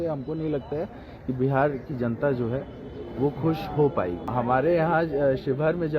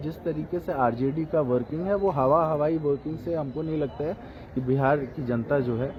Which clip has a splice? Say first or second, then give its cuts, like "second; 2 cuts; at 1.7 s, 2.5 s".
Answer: first; 1 cut; at 4.3 s